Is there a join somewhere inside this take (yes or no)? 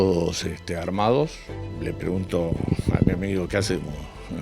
yes